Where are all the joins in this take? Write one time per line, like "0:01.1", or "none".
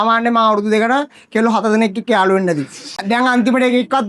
0:03.0